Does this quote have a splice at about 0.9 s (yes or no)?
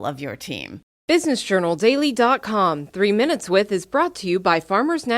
yes